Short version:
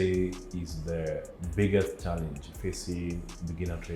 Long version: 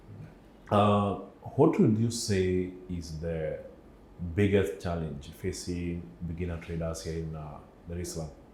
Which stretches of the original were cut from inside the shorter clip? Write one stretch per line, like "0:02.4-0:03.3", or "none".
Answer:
0:03.7-0:04.2